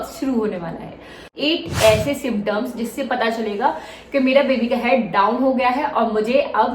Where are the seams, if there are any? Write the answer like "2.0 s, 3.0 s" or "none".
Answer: 1.3 s